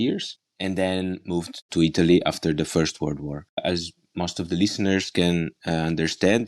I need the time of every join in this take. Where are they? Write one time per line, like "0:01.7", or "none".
0:03.6